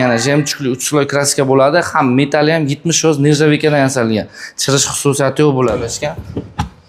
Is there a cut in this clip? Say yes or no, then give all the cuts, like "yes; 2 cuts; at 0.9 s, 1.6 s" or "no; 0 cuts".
yes; 1 cut; at 5.9 s